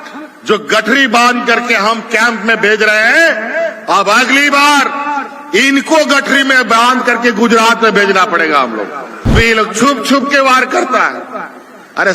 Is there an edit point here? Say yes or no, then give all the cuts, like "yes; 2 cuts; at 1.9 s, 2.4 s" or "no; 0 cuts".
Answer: yes; 1 cut; at 9.3 s